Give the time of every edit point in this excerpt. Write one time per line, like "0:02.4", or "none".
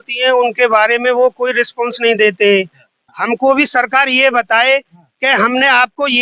0:03.0